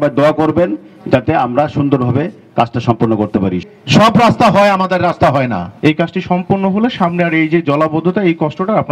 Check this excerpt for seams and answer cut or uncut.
cut